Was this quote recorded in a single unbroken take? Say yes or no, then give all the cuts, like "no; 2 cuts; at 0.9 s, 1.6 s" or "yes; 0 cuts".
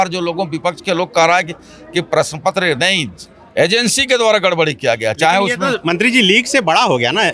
yes; 0 cuts